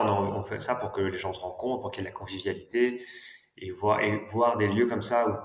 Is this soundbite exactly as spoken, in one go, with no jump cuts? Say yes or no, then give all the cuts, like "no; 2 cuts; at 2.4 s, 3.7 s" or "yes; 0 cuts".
yes; 0 cuts